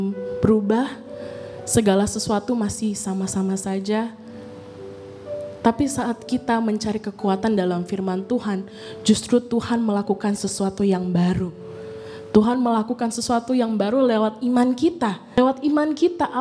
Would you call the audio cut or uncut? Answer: cut